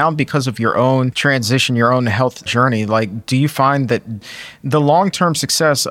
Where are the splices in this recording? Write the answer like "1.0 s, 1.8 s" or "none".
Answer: 1.1 s, 2.4 s, 4.2 s